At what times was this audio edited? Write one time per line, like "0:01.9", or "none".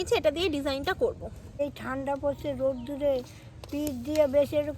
0:01.6